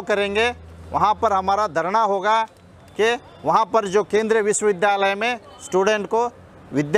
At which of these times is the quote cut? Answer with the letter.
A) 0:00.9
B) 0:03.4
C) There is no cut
C